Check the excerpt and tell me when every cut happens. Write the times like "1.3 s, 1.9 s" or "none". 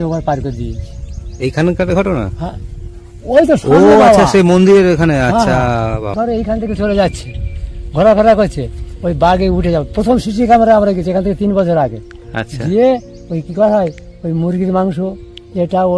6.1 s